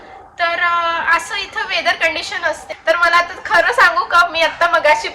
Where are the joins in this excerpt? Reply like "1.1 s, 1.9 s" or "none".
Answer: 2.7 s